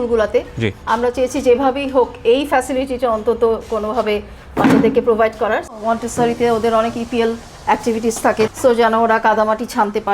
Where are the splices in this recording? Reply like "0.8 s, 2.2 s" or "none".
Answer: 5.7 s, 8.5 s